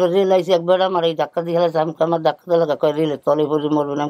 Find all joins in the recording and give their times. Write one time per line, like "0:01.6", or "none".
none